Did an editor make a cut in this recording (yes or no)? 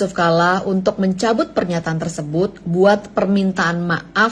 no